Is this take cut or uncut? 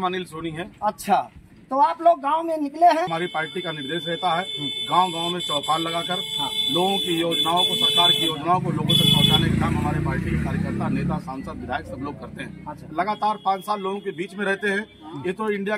cut